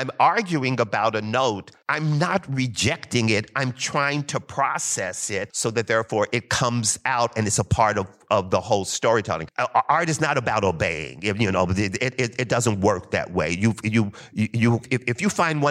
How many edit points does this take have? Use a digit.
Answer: 4